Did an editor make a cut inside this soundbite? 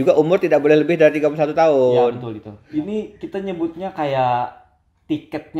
yes; 1 cut; at 2.5 s

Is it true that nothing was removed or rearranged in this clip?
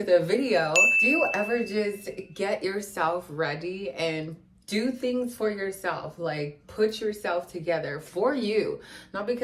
no; 1 cut; at 0.9 s

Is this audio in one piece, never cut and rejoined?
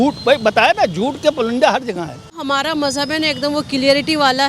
no; 1 cut; at 2.4 s

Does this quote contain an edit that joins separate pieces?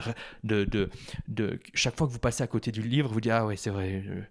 no; 0 cuts

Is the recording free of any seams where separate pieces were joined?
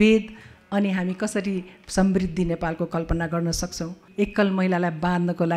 no; 1 cut; at 4.0 s

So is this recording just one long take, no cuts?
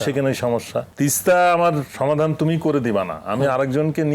no; 2 cuts; at 0.9 s, 1.9 s

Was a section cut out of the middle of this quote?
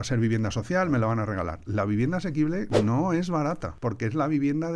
yes; 1 cut; at 3.7 s

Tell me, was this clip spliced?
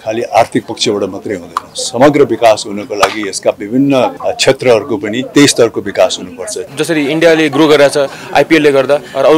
yes; 3 cuts; at 4.2 s, 5.2 s, 6.7 s

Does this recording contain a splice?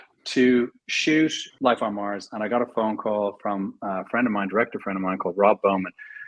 yes; 1 cut; at 1.4 s

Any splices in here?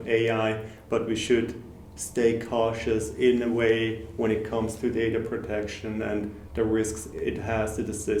no; 0 cuts

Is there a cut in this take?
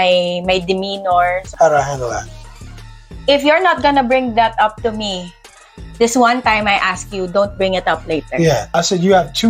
yes; 2 cuts; at 1.5 s, 8.7 s

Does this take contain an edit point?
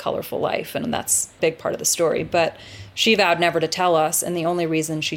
yes; 1 cut; at 1.3 s

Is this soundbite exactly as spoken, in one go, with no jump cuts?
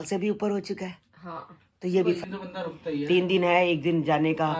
no; 1 cut; at 2.2 s

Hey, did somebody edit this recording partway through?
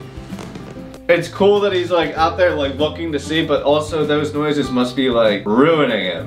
no; 0 cuts

